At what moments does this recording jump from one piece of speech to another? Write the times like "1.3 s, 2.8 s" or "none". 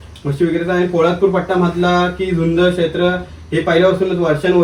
none